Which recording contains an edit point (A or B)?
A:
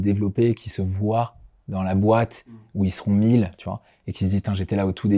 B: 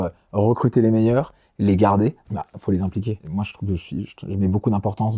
B